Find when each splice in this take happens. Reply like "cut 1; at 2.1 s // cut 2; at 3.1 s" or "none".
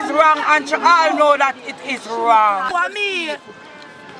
cut 1; at 2.7 s